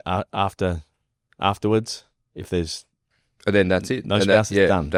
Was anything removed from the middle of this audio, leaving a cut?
no; 0 cuts

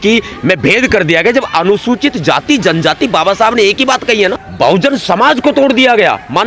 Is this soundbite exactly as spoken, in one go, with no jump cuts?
no; 1 cut; at 4.4 s

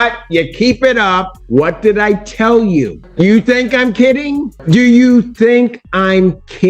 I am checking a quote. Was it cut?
yes; 3 cuts; at 1.3 s, 3.0 s, 4.5 s

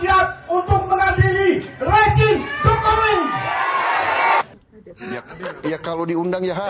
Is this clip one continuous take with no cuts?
no; 1 cut; at 4.6 s

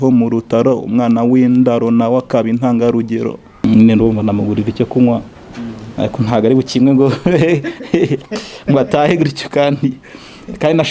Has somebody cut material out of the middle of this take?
yes; 1 cut; at 3.5 s

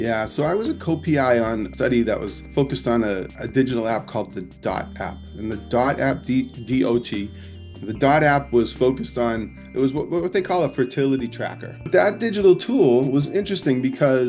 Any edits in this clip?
yes; 1 cut; at 11.8 s

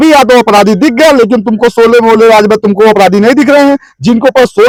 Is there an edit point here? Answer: no; 0 cuts

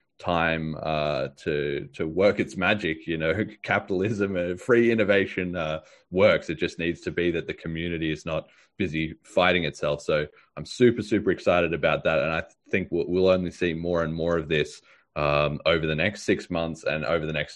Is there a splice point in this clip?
no; 0 cuts

